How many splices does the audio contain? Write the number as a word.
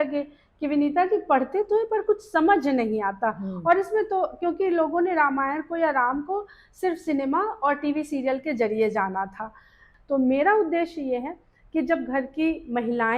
one